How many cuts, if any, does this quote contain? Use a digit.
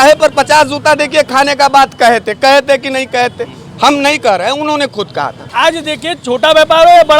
1